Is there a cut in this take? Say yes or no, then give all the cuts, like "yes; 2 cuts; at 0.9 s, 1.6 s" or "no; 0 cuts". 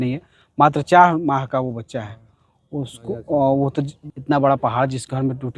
yes; 1 cut; at 4.0 s